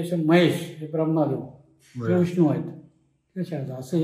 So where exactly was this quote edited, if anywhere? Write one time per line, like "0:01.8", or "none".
none